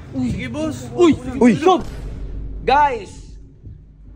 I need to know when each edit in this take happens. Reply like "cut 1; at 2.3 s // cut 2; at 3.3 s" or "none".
cut 1; at 2.2 s